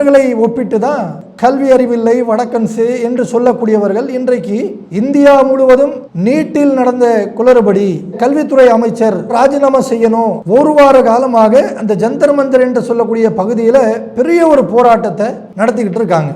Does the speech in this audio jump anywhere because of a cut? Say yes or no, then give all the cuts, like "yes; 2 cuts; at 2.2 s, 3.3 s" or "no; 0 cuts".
yes; 3 cuts; at 1.1 s, 10.4 s, 15.4 s